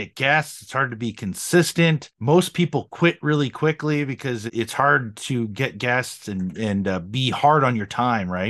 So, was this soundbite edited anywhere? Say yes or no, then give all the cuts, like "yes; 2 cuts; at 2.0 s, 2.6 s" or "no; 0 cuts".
yes; 2 cuts; at 2.1 s, 4.5 s